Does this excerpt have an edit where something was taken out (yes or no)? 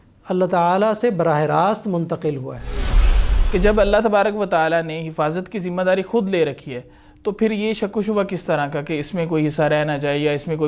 yes